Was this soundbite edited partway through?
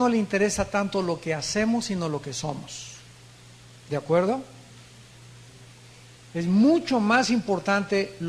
yes; 1 cut; at 3.8 s

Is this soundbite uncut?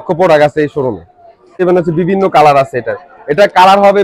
no; 1 cut; at 1.3 s

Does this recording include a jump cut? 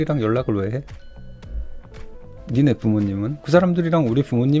no; 0 cuts

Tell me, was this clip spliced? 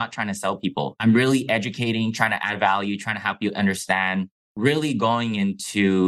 yes; 2 cuts; at 1.0 s, 4.5 s

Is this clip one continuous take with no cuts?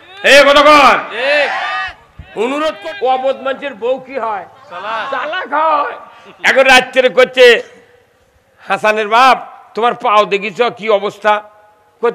no; 1 cut; at 2.8 s

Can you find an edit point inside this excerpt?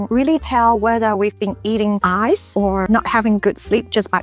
no; 0 cuts

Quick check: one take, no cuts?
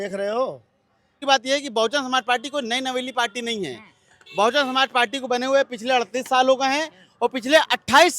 no; 1 cut; at 1.2 s

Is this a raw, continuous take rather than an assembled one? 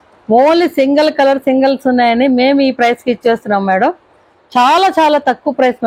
yes; 0 cuts

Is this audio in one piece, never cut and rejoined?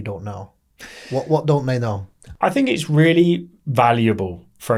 yes; 0 cuts

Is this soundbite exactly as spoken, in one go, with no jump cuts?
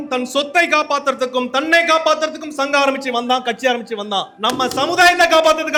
yes; 0 cuts

